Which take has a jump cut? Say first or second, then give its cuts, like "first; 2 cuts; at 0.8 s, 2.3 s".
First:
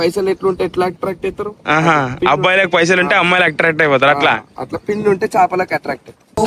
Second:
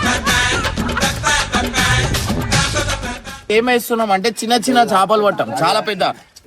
second; 1 cut; at 3.5 s